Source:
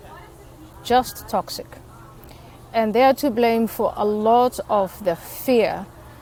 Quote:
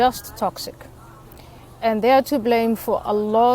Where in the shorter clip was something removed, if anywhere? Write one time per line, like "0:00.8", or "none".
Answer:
none